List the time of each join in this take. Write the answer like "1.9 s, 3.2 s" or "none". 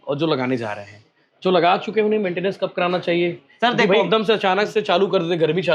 none

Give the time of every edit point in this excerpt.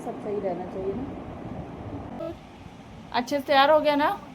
2.2 s

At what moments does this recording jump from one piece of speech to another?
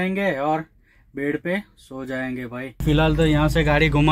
2.8 s

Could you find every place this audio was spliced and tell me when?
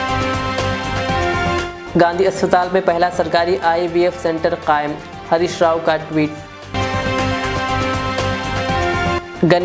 none

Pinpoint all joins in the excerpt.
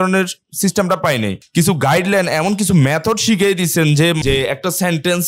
1.4 s, 4.2 s

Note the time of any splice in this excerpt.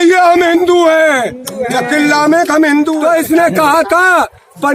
3.0 s

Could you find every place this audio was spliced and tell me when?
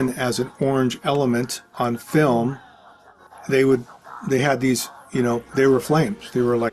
none

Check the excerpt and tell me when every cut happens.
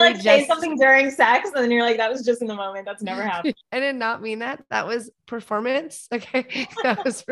3.6 s

